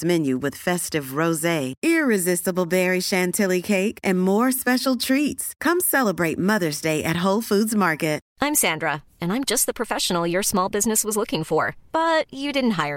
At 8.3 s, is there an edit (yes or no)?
yes